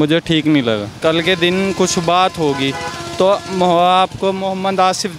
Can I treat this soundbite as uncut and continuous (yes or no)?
no